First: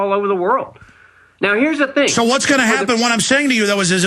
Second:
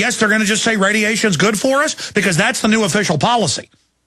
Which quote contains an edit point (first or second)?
first